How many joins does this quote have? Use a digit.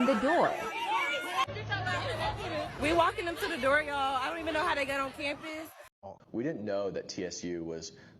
2